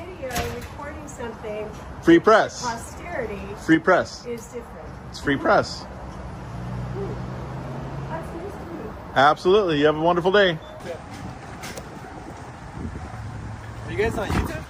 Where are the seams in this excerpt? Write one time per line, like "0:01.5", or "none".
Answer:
none

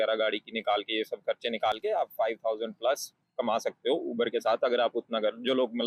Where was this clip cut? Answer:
none

